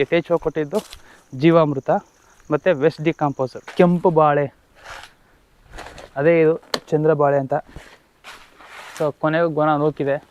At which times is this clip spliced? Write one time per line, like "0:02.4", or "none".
0:03.6